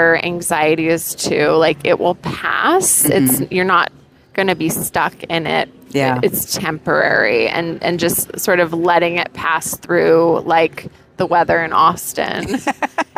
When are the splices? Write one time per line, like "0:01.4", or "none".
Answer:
none